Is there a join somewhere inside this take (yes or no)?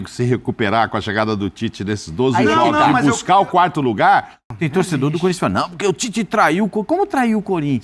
yes